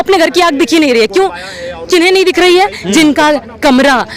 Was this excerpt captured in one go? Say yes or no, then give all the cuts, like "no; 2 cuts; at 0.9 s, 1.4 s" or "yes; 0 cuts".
yes; 0 cuts